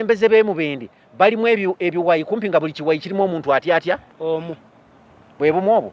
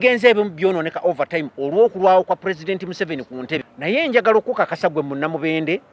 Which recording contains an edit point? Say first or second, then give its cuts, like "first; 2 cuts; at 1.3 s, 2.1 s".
second; 1 cut; at 3.5 s